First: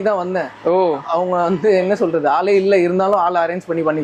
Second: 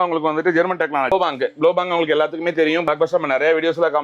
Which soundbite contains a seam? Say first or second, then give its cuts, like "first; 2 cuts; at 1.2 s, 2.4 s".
second; 2 cuts; at 1.1 s, 2.9 s